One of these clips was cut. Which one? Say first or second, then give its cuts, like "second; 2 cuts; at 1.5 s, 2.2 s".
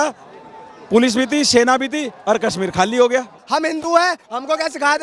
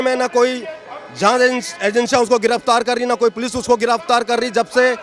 first; 1 cut; at 3.4 s